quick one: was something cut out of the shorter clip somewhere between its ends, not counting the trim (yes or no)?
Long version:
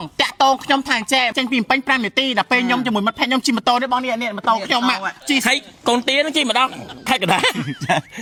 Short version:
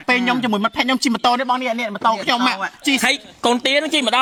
no